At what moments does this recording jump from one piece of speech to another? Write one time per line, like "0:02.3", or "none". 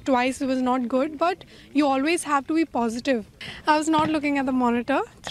0:03.4